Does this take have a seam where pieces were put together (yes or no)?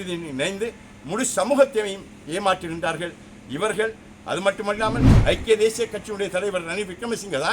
yes